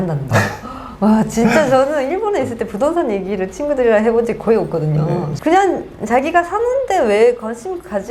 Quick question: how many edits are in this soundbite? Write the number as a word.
zero